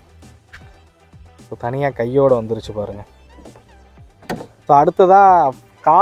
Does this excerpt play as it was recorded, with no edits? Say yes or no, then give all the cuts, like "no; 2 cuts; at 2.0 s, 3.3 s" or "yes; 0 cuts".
yes; 0 cuts